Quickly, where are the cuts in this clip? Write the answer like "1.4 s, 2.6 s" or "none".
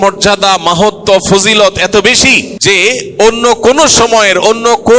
2.5 s